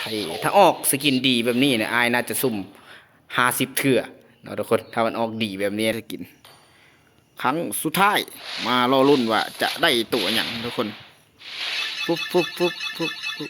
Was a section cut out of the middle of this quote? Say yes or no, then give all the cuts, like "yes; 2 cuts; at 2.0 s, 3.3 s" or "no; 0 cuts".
yes; 1 cut; at 5.9 s